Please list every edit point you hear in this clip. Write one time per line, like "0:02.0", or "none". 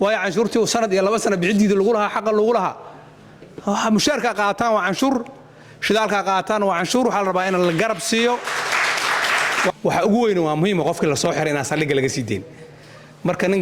0:09.7

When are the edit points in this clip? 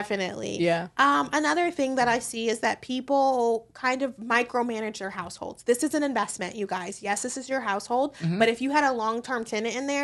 none

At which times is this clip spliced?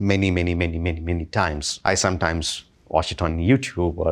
0:01.7

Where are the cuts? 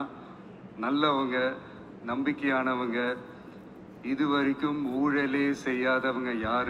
none

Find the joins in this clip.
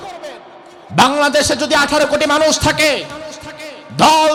none

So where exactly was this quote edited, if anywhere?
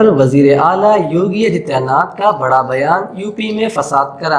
none

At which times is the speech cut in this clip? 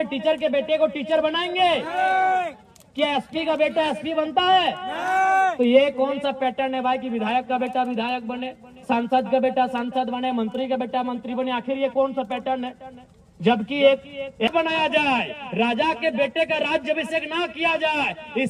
0:14.5

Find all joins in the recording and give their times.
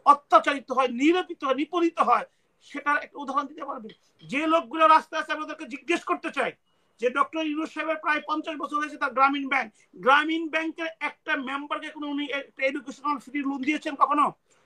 none

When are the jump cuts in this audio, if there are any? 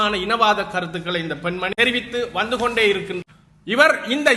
0:01.7
0:03.2

